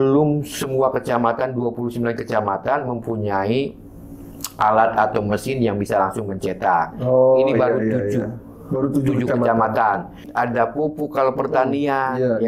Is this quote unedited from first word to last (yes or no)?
no